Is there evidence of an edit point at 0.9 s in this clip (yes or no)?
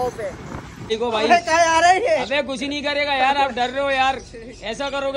yes